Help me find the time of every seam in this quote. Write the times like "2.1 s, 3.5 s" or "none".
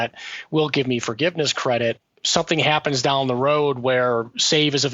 2.1 s